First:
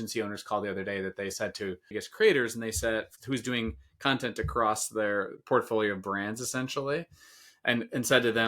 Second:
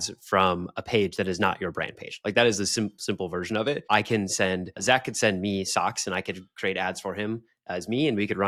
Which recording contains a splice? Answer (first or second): first